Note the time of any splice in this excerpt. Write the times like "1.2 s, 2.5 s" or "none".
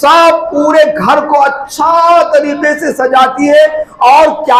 none